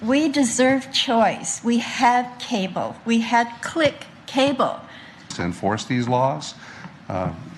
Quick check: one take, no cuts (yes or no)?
no